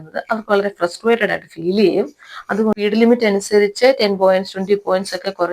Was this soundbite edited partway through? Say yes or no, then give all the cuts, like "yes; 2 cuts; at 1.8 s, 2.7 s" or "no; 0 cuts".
yes; 1 cut; at 2.7 s